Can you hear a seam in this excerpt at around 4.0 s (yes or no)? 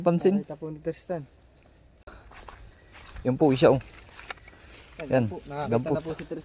no